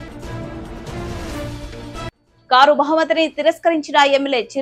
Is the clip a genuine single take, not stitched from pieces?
yes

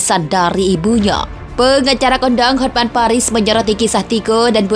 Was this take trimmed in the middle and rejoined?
yes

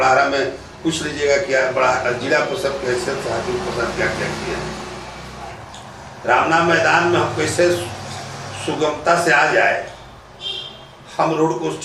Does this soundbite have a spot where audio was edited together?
yes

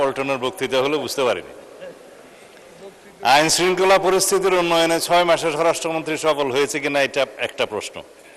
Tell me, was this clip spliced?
no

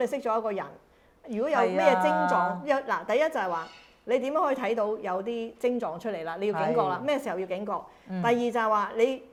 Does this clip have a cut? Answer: no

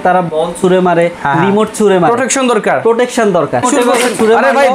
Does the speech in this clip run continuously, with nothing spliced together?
no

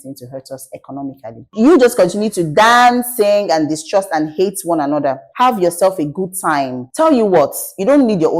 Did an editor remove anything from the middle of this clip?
yes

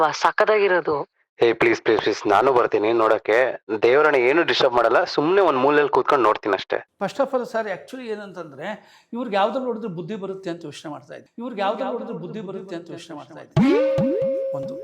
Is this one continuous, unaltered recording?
no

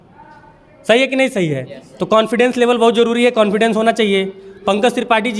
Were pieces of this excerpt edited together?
no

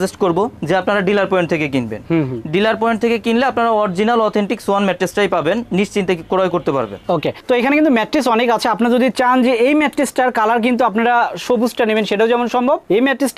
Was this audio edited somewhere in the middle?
no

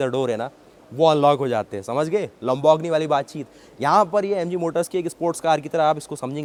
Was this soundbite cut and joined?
no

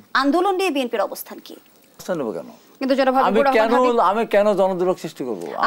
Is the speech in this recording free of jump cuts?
no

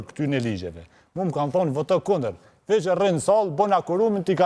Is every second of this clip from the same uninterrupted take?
yes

